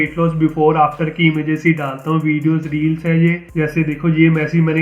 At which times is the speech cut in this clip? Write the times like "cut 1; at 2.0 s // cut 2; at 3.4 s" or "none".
cut 1; at 3.4 s